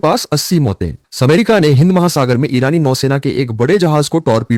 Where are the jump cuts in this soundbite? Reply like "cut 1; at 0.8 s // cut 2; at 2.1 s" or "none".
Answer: none